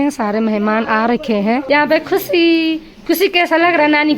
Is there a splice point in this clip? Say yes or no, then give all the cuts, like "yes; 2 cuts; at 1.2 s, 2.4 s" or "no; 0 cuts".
yes; 1 cut; at 1.6 s